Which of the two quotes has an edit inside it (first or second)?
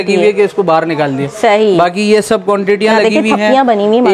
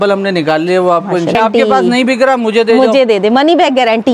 second